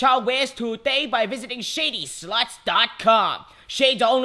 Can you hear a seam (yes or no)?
no